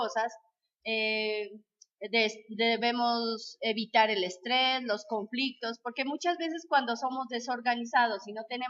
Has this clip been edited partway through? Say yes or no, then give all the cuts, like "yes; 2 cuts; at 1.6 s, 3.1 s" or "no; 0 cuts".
yes; 1 cut; at 5.0 s